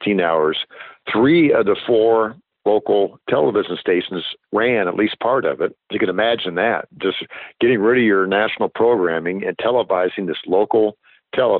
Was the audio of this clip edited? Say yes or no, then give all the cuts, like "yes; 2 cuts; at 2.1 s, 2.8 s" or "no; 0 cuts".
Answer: yes; 2 cuts; at 1.0 s, 5.8 s